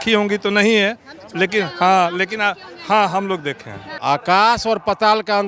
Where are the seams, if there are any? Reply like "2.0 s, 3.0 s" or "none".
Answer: 3.8 s